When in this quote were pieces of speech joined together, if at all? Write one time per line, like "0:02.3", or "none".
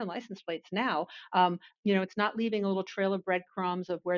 0:01.6